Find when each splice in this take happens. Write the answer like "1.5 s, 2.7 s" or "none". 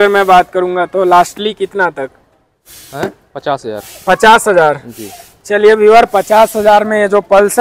none